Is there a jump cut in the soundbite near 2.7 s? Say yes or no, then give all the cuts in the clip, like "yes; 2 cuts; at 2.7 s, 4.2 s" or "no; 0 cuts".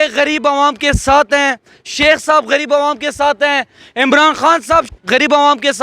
no; 1 cut; at 4.9 s